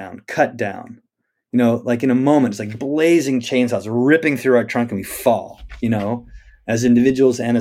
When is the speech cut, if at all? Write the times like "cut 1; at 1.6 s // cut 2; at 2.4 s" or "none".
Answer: none